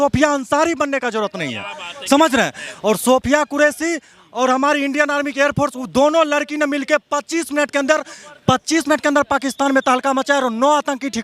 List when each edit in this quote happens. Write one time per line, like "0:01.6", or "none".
none